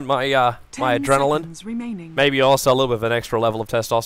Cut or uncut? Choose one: cut